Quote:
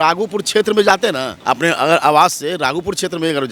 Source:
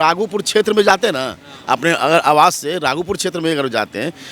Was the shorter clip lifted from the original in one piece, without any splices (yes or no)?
no